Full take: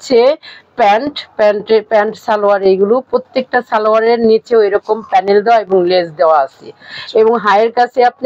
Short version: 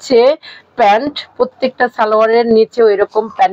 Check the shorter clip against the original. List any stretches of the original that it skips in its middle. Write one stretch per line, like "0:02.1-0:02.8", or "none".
0:01.3-0:03.0